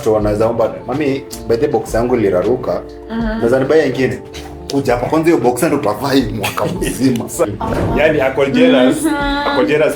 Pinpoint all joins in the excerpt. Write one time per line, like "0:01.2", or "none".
0:07.5